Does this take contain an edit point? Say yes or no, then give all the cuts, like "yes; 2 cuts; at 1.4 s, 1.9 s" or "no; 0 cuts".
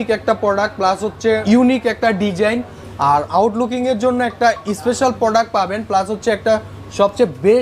yes; 2 cuts; at 1.4 s, 3.3 s